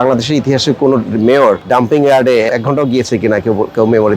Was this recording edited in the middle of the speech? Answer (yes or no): yes